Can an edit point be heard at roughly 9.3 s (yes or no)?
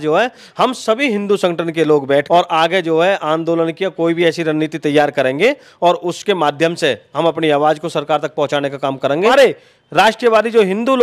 yes